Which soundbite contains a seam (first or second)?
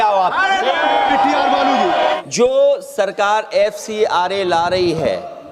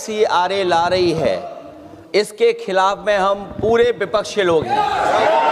first